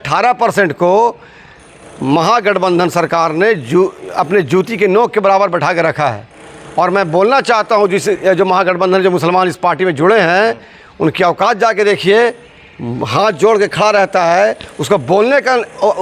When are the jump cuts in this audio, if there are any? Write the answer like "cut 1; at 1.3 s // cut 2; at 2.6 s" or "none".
none